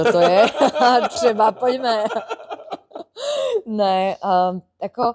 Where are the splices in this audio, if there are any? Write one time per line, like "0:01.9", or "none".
none